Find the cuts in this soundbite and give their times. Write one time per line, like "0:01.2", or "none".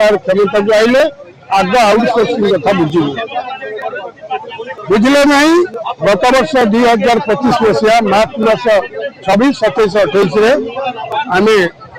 none